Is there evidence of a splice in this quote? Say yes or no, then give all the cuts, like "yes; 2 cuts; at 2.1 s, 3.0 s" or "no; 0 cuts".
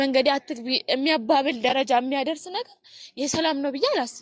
no; 0 cuts